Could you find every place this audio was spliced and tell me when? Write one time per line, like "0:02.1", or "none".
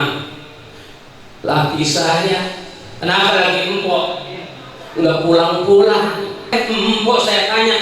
0:06.5